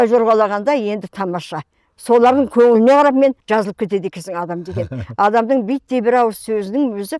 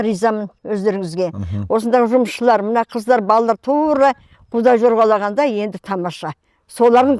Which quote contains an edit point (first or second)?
first